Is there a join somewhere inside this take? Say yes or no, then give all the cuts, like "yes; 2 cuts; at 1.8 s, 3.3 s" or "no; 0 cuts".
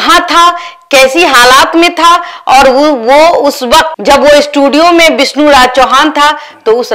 no; 0 cuts